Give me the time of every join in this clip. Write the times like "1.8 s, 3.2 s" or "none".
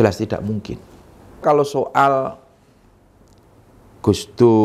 1.4 s